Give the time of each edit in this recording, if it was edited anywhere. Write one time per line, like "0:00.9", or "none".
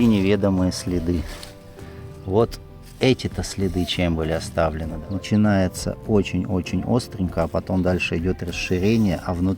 0:04.9

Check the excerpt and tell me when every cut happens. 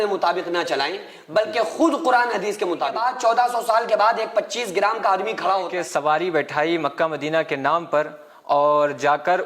0:03.0
0:05.7

